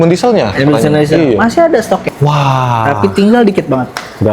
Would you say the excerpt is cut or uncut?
cut